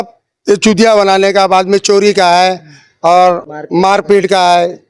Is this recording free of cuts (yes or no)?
yes